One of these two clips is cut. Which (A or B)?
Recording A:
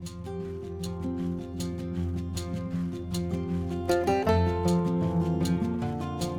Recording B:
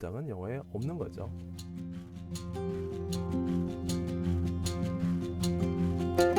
B